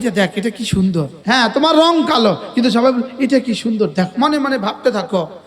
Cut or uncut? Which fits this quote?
cut